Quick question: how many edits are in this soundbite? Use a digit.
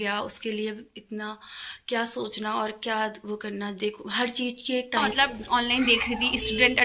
1